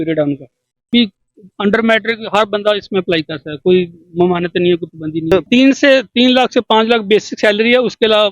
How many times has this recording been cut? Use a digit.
2